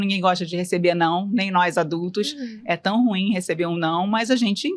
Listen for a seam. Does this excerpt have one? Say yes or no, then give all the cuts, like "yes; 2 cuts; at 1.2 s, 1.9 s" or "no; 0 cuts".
no; 0 cuts